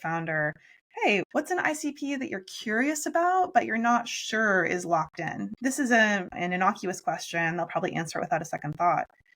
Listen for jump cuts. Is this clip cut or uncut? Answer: cut